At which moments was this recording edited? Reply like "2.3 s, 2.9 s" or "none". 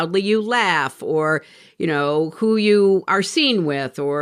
none